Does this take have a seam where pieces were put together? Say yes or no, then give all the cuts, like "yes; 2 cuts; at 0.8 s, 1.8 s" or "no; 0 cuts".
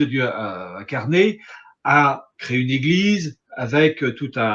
no; 0 cuts